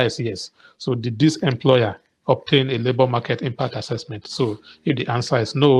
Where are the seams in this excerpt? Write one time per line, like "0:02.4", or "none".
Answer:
none